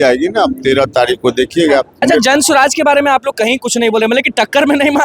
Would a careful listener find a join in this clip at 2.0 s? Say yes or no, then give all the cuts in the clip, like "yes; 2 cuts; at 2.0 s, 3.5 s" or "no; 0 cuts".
yes; 1 cut; at 2.0 s